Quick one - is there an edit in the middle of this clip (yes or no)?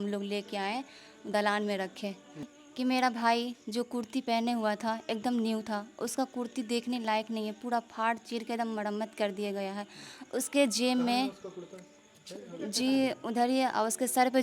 yes